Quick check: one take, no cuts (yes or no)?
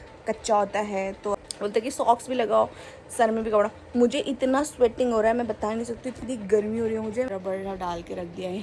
no